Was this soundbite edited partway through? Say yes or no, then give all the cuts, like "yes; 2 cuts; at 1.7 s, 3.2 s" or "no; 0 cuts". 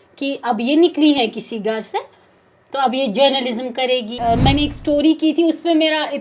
yes; 1 cut; at 4.2 s